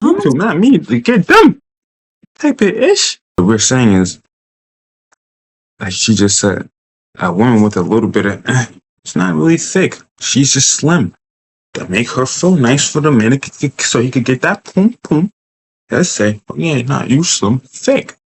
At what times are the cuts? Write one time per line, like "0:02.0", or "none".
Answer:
0:03.2